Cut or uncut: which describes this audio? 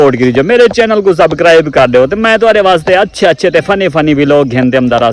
uncut